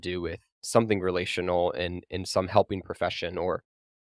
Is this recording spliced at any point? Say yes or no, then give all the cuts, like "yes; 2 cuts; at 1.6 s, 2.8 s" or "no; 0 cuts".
no; 0 cuts